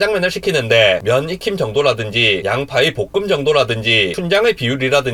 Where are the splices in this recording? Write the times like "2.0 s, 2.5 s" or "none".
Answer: none